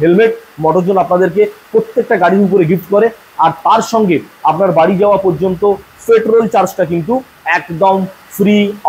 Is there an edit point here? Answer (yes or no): no